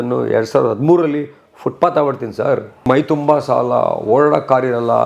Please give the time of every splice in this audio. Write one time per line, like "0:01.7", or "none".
0:02.9